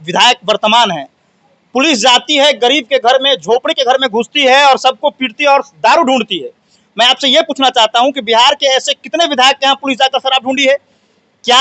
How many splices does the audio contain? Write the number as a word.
zero